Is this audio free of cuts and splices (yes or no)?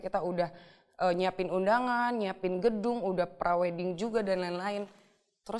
yes